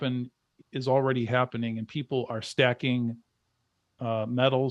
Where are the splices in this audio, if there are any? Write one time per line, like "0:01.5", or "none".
none